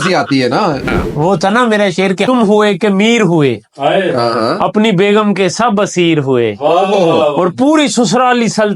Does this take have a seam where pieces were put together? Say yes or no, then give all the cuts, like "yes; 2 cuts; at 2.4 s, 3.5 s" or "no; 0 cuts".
yes; 2 cuts; at 1.0 s, 2.3 s